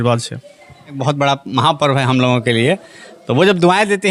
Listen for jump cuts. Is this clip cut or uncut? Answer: cut